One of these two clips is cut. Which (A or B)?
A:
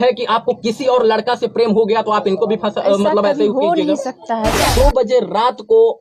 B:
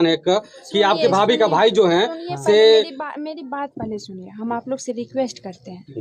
A